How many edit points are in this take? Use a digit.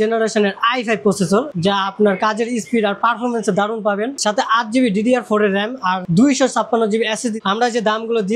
4